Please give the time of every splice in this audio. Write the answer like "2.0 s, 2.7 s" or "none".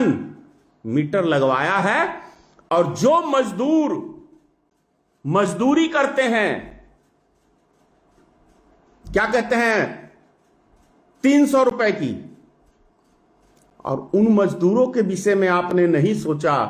none